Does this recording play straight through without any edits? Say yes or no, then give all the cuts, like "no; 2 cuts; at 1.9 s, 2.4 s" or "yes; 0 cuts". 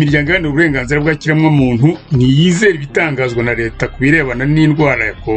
yes; 0 cuts